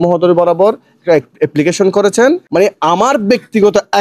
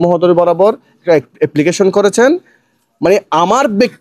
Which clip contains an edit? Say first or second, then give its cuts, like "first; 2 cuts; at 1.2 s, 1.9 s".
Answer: first; 1 cut; at 2.4 s